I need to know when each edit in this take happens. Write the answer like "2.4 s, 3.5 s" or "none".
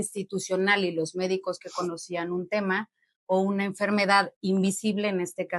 none